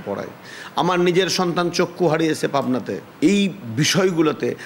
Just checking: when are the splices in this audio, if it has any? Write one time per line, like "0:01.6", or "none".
0:03.0